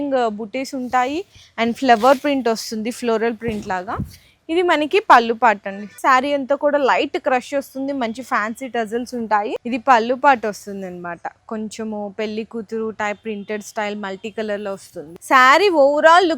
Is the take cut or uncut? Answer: cut